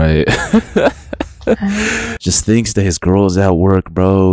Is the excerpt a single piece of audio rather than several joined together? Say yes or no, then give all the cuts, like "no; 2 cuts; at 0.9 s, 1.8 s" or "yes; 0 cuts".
no; 1 cut; at 2.2 s